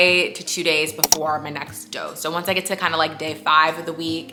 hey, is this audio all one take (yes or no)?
yes